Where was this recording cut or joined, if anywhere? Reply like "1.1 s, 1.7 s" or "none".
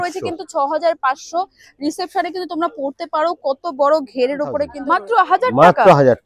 4.7 s